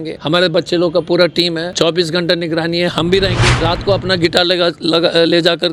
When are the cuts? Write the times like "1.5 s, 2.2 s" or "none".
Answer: none